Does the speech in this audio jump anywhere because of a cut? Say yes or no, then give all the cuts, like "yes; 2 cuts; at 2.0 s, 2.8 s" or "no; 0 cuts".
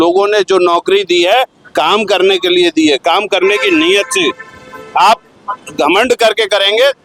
no; 0 cuts